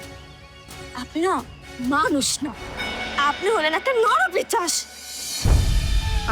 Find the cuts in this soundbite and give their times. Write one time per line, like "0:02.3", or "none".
0:00.9